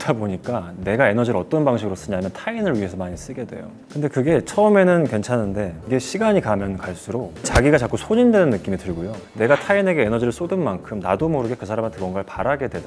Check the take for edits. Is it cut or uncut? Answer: uncut